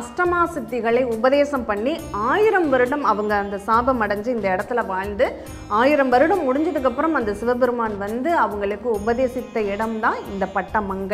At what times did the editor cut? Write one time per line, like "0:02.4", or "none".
none